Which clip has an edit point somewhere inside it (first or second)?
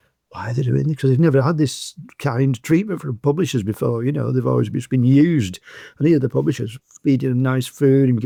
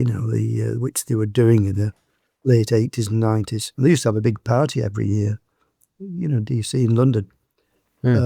second